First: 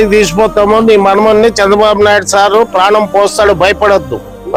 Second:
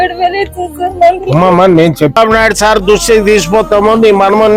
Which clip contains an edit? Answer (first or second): second